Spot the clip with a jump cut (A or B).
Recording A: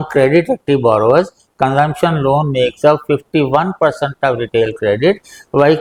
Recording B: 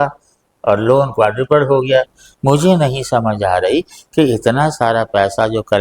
B